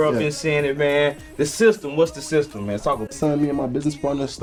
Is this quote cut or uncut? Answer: uncut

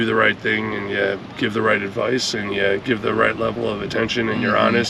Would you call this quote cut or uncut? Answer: uncut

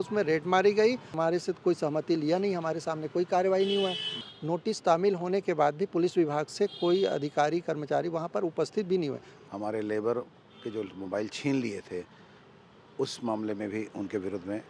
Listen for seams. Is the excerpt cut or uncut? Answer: cut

